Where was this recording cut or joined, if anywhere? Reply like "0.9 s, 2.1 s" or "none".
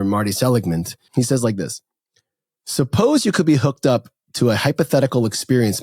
1.0 s